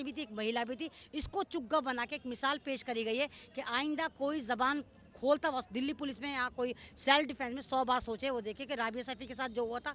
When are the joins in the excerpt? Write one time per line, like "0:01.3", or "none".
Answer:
none